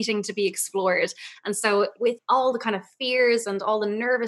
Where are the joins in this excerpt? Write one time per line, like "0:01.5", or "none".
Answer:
0:02.2